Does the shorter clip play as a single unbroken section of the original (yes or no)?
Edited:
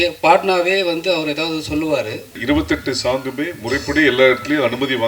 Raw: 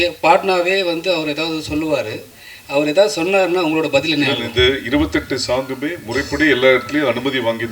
no